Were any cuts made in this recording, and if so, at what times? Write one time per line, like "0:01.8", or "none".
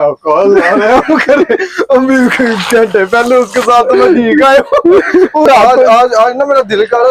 0:05.5